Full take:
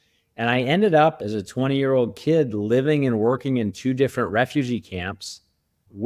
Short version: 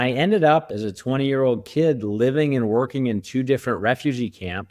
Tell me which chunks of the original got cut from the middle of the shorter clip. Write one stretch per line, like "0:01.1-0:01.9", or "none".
none

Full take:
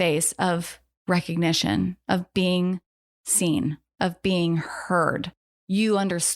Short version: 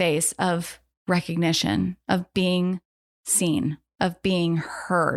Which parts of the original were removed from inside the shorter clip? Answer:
none

